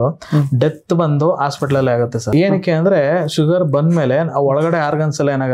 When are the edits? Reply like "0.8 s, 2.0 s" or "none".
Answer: none